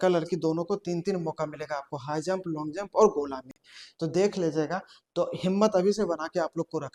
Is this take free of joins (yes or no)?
yes